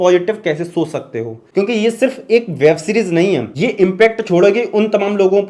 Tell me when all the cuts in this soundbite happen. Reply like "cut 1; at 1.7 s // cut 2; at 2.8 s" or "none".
cut 1; at 1.3 s // cut 2; at 3.5 s